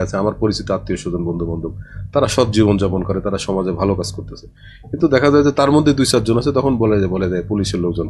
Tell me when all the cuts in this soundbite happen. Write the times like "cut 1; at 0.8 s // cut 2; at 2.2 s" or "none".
none